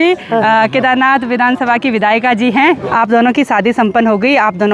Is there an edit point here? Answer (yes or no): yes